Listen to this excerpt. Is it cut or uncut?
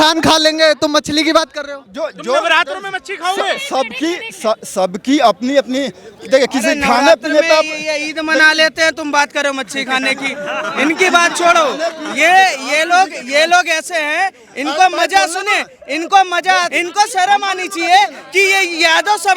uncut